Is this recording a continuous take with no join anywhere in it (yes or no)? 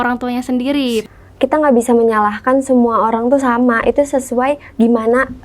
no